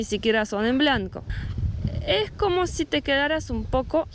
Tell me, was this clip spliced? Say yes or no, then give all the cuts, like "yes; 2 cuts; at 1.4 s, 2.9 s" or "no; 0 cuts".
yes; 1 cut; at 1.2 s